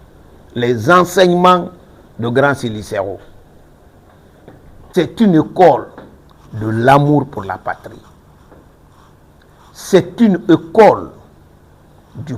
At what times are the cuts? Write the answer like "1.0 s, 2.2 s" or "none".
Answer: 4.9 s

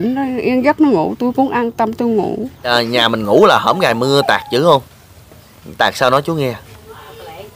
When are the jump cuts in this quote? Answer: 2.7 s

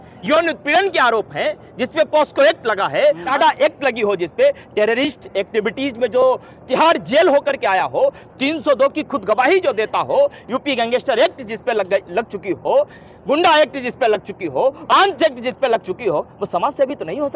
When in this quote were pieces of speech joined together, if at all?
3.2 s

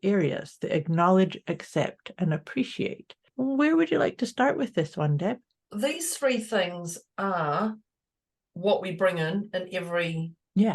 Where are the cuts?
3.3 s, 5.6 s

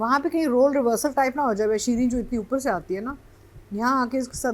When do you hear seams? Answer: none

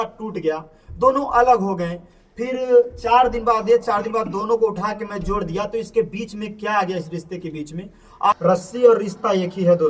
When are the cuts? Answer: 8.4 s

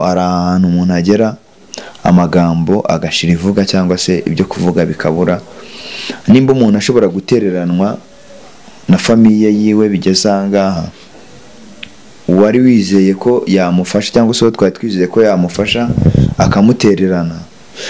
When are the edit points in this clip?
none

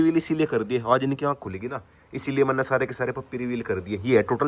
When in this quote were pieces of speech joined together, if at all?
none

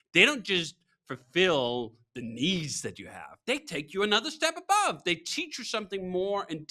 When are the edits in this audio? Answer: none

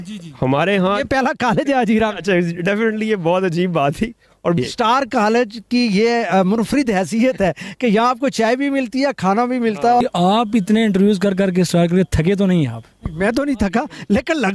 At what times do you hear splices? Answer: 4.6 s, 10.0 s

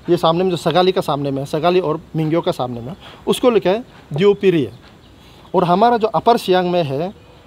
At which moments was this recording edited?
none

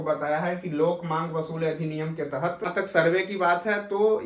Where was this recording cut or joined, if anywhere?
2.7 s

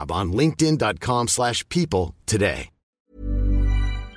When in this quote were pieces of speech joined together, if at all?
3.1 s

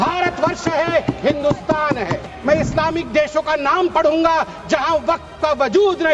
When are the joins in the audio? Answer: 2.2 s

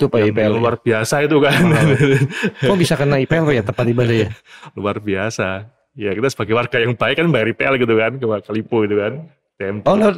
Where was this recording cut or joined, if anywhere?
none

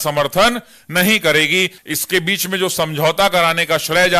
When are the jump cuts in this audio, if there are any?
1.7 s

